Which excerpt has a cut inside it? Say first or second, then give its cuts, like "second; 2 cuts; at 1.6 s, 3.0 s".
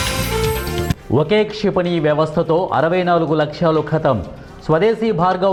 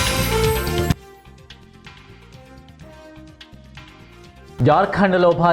second; 2 cuts; at 0.8 s, 3.5 s